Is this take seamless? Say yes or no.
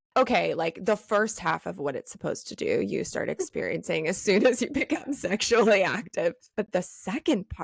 no